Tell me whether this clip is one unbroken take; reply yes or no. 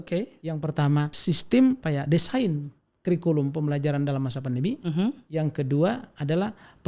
no